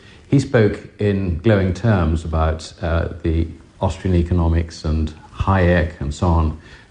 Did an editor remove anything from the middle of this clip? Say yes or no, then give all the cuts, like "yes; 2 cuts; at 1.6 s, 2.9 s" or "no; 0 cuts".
no; 0 cuts